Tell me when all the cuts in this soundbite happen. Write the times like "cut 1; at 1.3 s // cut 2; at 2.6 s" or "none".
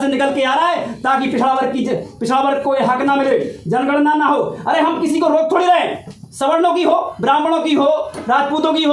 none